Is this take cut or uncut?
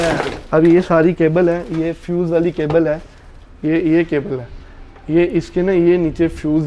uncut